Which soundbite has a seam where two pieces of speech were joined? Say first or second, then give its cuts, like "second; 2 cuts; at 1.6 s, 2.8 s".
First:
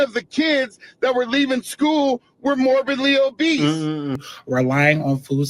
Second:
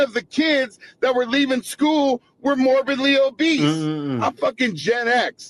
first; 1 cut; at 4.2 s